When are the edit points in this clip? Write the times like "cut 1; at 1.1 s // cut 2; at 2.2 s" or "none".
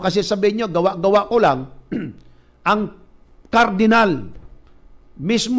cut 1; at 2.9 s // cut 2; at 4.4 s